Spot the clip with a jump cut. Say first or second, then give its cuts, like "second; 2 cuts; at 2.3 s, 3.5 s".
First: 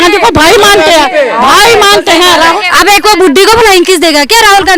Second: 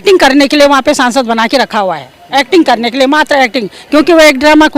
first; 1 cut; at 2.6 s